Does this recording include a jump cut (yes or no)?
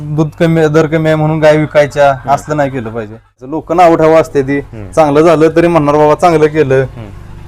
yes